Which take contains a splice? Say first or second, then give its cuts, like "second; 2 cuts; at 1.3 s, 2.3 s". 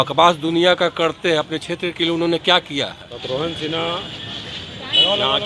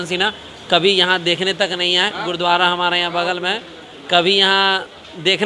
first; 1 cut; at 3.1 s